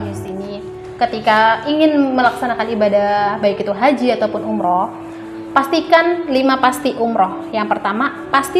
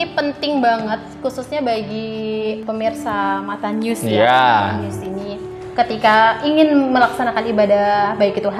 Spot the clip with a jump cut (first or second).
second